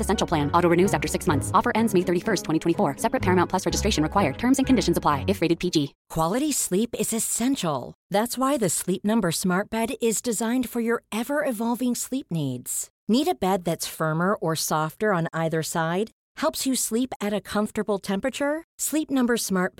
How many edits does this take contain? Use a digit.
1